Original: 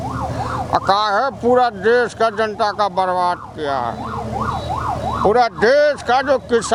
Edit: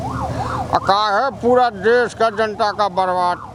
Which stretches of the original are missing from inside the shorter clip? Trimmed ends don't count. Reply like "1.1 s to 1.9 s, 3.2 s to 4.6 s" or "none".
none